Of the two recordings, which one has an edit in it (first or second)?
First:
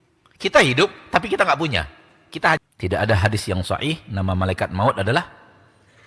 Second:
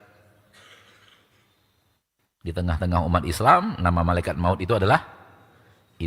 first